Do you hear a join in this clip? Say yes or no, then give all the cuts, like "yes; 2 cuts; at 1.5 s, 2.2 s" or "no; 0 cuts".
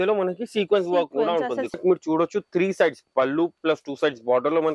yes; 1 cut; at 1.7 s